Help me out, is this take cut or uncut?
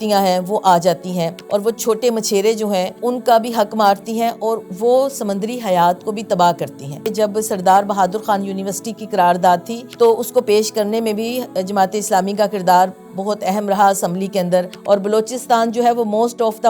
cut